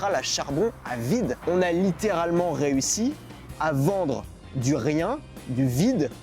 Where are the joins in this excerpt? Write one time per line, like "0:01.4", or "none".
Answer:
0:01.4

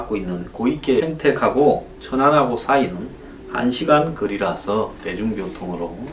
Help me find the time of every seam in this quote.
none

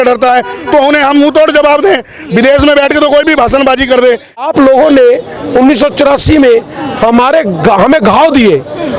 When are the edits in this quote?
0:04.4

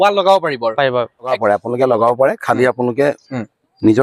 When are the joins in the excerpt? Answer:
0:01.6

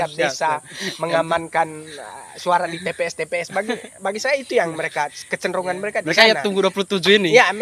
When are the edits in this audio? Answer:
none

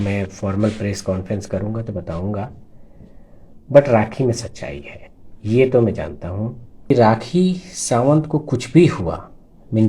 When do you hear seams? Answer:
0:06.9

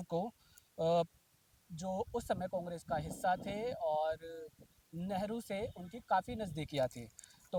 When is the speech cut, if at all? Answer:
none

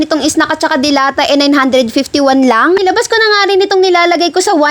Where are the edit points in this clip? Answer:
0:02.8

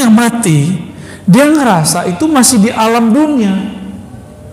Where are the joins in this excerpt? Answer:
none

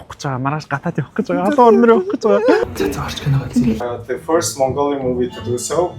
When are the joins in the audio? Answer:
0:02.6
0:03.8

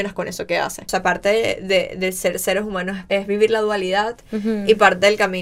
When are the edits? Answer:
0:00.9
0:03.0

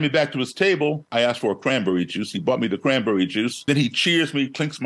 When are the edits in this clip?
0:01.1
0:03.7

